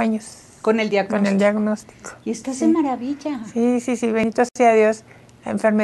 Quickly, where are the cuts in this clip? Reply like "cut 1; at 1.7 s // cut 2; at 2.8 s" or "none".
cut 1; at 4.2 s